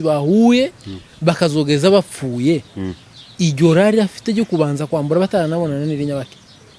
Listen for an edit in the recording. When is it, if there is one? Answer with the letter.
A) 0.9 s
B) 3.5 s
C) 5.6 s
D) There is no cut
D